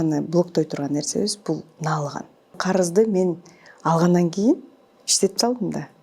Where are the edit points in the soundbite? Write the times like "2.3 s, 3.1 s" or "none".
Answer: 2.6 s